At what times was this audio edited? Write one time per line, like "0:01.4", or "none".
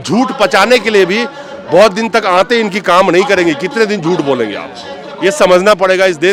none